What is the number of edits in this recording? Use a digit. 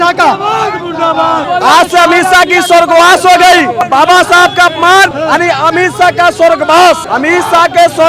4